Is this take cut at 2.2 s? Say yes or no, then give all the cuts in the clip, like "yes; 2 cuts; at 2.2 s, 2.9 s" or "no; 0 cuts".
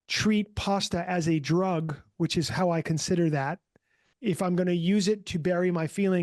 no; 1 cut; at 4.0 s